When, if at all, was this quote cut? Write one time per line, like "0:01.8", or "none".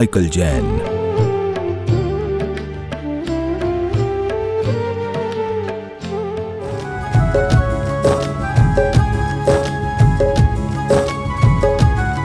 0:06.8